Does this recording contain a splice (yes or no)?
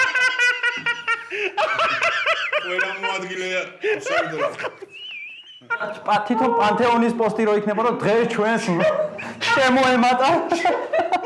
no